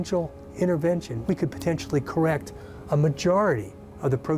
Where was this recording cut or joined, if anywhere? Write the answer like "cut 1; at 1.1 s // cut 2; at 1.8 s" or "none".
cut 1; at 1.1 s